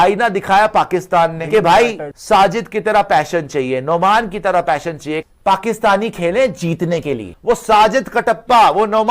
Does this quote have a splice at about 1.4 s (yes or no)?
yes